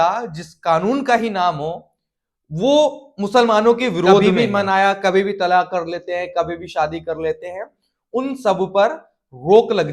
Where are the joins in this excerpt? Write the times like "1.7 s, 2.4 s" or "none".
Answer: 4.3 s

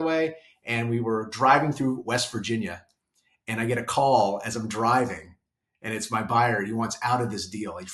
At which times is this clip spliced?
none

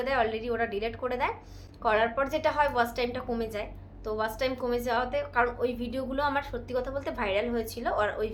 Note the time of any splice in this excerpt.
none

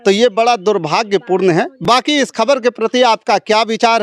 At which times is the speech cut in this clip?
none

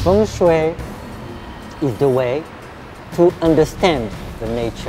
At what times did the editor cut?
none

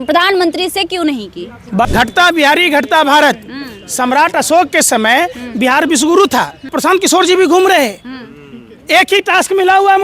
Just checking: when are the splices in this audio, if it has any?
1.9 s, 6.7 s

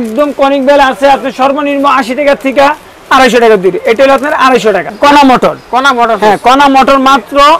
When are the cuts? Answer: 4.9 s

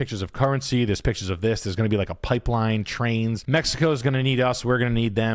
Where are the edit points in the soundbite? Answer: 3.4 s

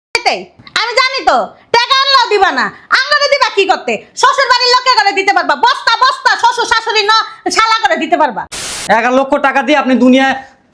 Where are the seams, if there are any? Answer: 8.8 s

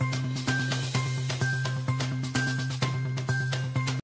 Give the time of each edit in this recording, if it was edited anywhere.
2.2 s

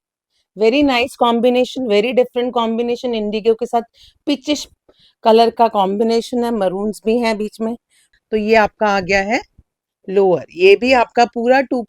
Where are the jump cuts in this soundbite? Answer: 8.0 s

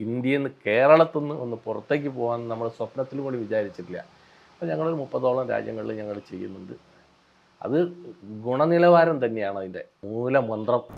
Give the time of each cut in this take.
10.0 s

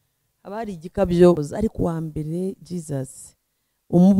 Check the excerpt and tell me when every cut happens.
1.4 s

